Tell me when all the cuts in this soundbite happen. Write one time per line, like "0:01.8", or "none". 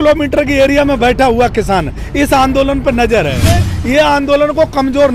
0:03.6